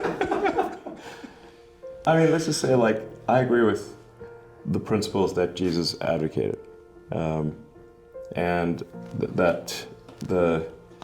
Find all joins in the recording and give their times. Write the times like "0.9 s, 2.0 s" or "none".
8.9 s